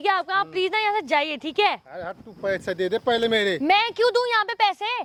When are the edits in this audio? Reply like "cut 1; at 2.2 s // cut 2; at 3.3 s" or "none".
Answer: none